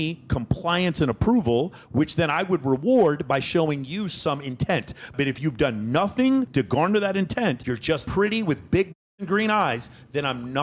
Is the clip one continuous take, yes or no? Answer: yes